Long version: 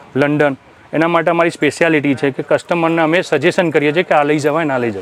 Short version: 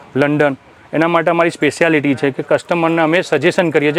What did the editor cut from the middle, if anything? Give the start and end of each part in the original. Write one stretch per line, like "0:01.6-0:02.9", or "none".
none